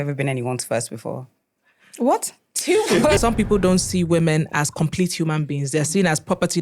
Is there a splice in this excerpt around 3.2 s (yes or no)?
yes